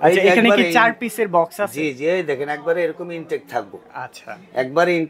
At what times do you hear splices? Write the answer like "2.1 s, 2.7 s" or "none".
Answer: none